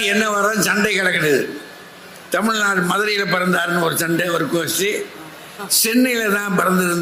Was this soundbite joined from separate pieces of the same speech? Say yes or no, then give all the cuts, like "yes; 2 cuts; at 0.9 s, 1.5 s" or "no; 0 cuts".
no; 0 cuts